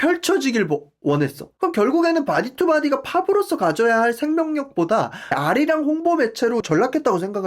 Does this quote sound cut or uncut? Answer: cut